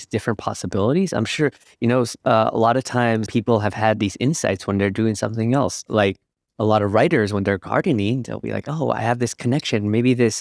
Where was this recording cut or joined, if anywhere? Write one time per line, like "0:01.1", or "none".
0:03.3